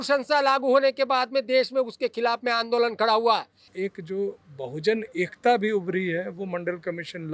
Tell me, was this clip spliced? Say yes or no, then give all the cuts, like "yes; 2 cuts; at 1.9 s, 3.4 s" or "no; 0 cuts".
yes; 1 cut; at 3.6 s